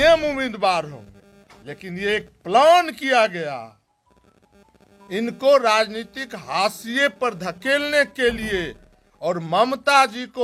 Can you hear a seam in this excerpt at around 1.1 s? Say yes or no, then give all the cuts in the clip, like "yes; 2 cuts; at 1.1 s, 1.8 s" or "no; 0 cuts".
no; 0 cuts